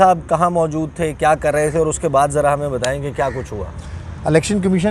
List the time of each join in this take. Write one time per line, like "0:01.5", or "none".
none